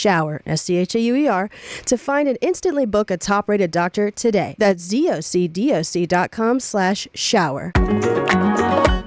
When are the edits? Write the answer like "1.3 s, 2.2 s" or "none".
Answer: 4.5 s, 7.7 s